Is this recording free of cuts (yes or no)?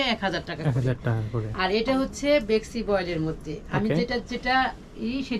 yes